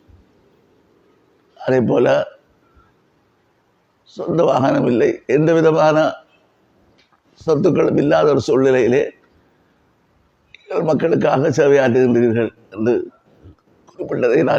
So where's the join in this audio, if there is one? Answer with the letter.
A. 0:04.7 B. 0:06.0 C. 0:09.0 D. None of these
D